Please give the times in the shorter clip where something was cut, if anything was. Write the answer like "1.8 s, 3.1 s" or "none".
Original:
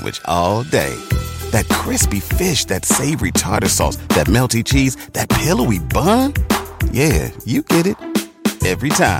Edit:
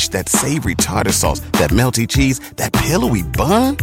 none